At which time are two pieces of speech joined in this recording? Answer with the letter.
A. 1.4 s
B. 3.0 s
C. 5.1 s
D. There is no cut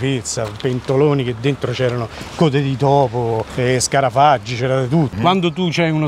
C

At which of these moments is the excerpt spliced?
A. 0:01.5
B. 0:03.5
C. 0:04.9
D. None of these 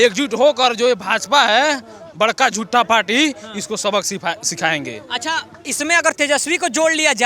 D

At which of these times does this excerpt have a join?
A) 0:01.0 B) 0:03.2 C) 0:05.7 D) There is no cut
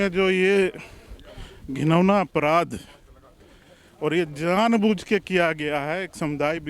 D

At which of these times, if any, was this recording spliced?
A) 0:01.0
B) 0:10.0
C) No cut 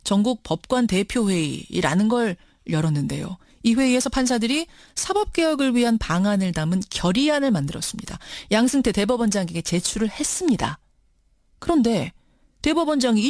C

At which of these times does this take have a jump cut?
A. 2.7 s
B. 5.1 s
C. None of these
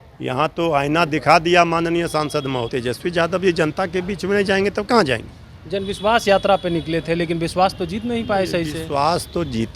A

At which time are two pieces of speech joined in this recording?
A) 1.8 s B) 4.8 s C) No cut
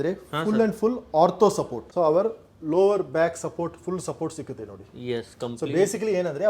A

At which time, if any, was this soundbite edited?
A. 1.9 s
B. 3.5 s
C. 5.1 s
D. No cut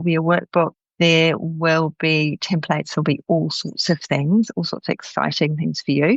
D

